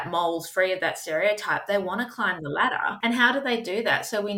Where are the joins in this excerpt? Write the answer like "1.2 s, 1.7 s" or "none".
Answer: 3.0 s